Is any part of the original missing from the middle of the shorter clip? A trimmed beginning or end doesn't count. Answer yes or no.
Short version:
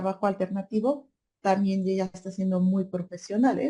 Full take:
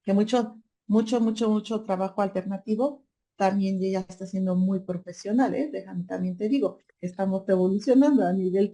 no